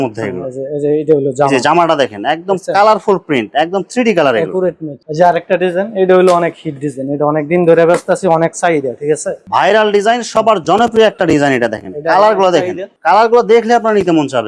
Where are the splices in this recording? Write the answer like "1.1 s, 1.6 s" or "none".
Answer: none